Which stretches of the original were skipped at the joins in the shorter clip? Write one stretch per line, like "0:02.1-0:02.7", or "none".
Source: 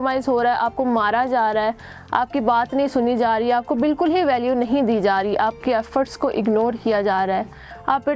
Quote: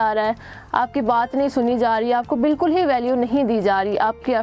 none